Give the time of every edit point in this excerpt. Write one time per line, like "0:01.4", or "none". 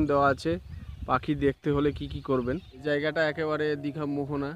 0:02.7